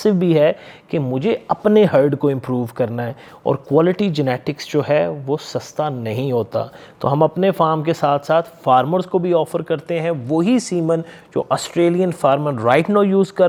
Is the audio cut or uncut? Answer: uncut